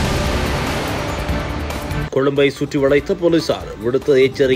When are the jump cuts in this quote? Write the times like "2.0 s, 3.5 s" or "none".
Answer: 2.0 s